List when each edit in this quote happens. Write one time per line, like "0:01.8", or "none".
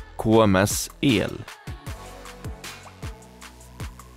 0:01.5